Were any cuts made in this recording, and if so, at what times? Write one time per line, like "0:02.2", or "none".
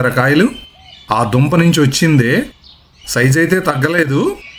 none